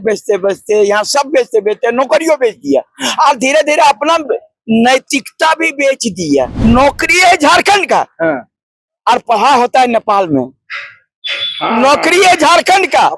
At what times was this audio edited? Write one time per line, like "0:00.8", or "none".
0:06.5